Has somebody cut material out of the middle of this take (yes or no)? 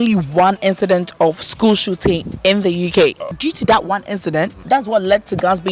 yes